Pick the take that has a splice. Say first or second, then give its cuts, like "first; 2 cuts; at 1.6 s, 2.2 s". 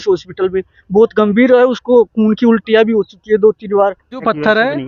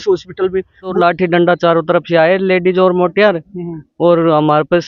second; 1 cut; at 0.9 s